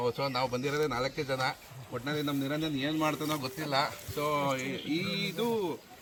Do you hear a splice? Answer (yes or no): no